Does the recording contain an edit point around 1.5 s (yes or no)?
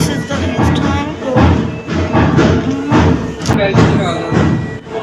no